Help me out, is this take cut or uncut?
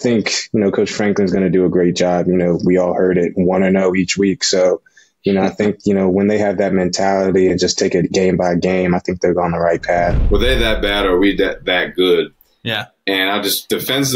cut